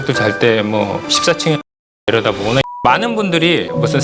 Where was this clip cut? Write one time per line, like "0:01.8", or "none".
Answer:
0:02.8

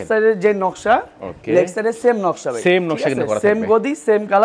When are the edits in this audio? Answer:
none

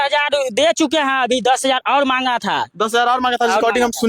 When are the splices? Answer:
none

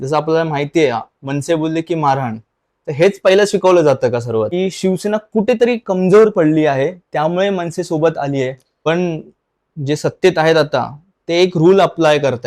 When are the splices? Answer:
0:04.5
0:08.7

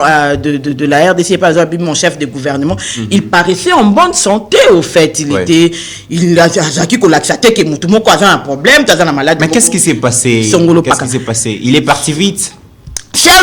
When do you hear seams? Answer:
none

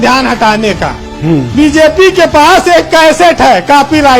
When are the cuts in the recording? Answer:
0:01.5

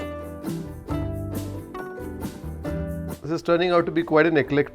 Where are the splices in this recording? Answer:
none

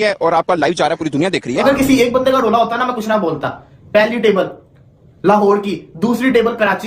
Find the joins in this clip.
0:01.6

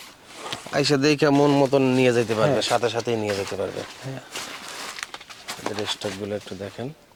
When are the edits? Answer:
none

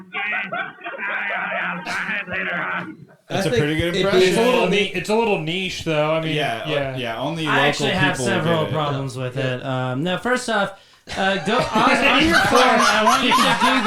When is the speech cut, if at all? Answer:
0:03.3

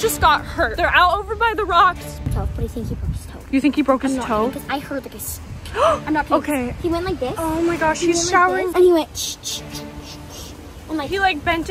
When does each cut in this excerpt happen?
0:02.2

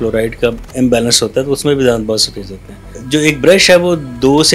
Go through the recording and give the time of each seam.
0:03.0

